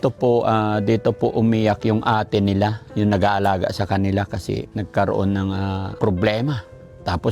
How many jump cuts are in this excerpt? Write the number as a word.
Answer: two